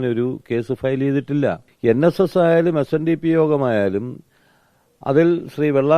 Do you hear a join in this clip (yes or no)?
yes